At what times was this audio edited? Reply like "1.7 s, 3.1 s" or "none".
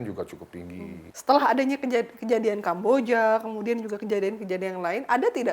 1.1 s